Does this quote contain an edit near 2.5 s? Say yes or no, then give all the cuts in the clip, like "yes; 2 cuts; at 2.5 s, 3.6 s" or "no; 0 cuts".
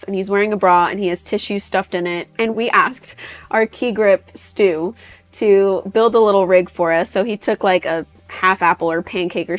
yes; 1 cut; at 2.5 s